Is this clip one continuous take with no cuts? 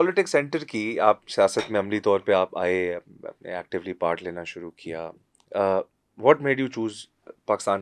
yes; 0 cuts

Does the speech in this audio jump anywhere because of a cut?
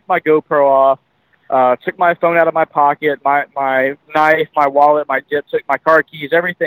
no; 0 cuts

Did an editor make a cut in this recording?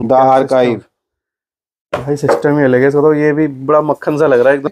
no; 0 cuts

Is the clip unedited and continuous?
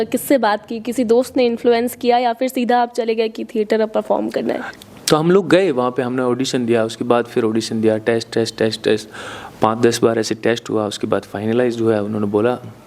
no; 1 cut; at 4.7 s

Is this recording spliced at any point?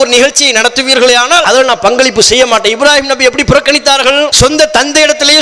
yes; 2 cuts; at 1.4 s, 4.3 s

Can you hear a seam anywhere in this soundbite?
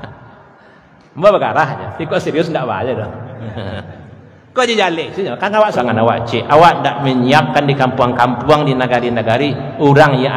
yes; 1 cut; at 5.8 s

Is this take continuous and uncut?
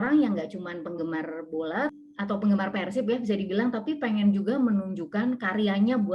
no; 1 cut; at 1.9 s

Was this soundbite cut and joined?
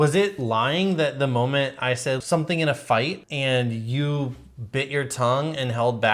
yes; 2 cuts; at 2.2 s, 3.2 s

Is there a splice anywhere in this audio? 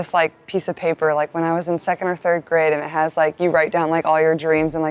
no; 0 cuts

